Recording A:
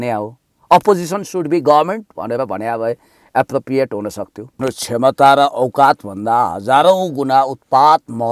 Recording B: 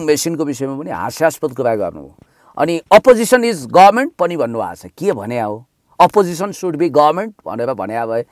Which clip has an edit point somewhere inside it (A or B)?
A